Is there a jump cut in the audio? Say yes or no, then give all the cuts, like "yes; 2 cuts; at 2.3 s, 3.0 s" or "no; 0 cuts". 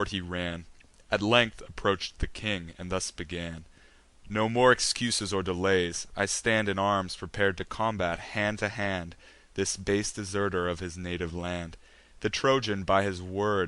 yes; 1 cut; at 11.3 s